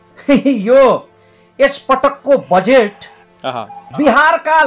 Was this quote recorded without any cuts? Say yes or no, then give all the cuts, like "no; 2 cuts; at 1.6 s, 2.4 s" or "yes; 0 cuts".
yes; 0 cuts